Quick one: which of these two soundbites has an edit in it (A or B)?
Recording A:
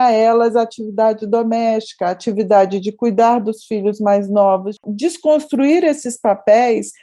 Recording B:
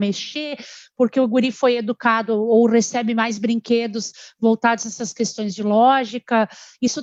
A